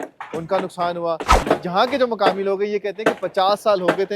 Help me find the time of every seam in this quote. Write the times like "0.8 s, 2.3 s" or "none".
1.3 s